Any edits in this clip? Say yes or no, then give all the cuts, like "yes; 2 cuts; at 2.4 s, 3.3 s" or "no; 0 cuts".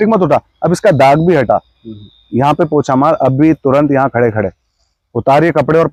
no; 0 cuts